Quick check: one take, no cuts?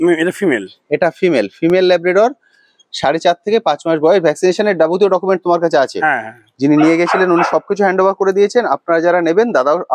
yes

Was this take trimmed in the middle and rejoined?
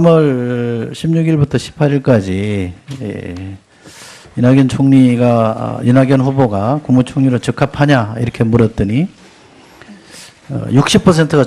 yes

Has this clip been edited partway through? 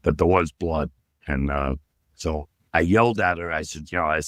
no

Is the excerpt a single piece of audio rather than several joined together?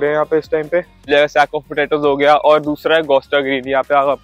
no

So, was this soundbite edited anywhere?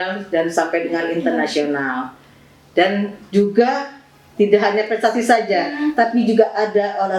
no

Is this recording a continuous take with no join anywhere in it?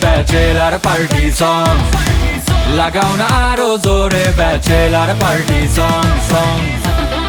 yes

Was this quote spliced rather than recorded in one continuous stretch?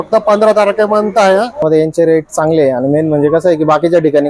yes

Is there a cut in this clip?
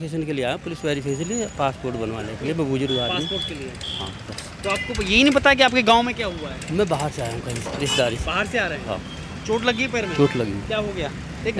no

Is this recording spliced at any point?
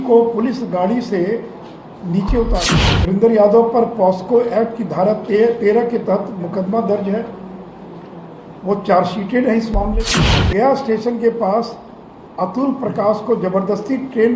yes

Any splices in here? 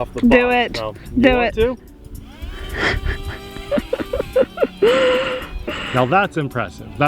yes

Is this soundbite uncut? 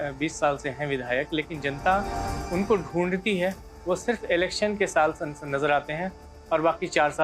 yes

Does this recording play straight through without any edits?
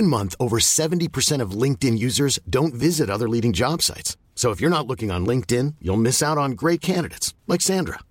yes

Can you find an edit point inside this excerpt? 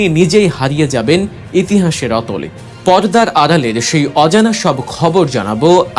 no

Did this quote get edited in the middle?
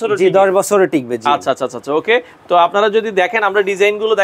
no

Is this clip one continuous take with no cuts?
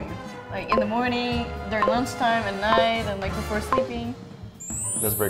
yes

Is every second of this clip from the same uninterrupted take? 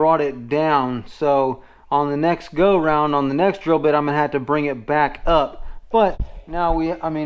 yes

